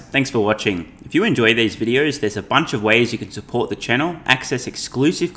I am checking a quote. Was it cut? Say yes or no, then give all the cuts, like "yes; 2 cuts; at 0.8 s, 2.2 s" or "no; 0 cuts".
no; 0 cuts